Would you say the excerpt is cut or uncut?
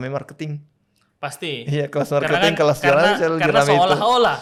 uncut